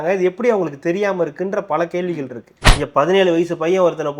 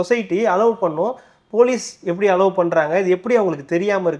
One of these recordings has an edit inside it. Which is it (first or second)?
first